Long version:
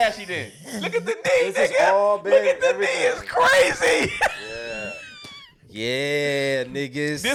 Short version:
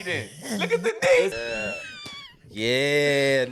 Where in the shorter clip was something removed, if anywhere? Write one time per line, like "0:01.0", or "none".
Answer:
0:01.3